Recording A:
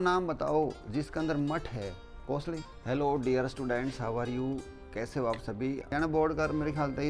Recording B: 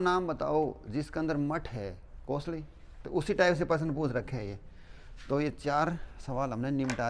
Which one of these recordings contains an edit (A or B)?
A